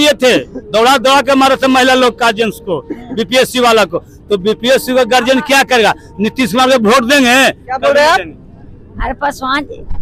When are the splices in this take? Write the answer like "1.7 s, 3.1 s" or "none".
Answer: none